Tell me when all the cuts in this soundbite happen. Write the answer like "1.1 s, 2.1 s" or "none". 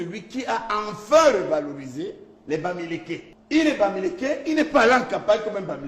3.3 s